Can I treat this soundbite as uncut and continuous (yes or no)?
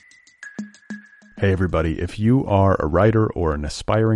no